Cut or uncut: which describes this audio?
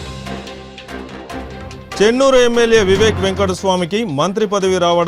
cut